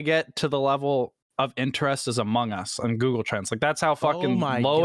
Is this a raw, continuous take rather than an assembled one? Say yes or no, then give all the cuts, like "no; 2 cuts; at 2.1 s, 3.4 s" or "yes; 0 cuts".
yes; 0 cuts